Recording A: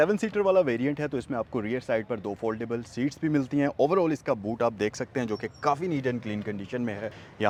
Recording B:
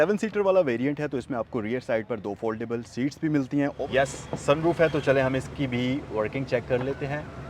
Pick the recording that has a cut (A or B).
B